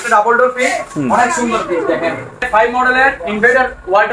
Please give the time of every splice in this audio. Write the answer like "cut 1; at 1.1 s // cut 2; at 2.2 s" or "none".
cut 1; at 2.5 s